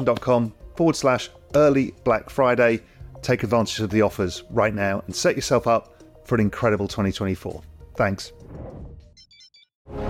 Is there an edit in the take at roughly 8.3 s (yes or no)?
yes